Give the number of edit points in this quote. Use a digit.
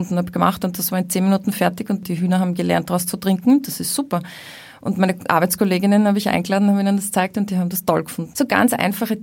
2